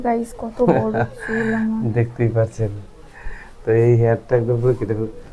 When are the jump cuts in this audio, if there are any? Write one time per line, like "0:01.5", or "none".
none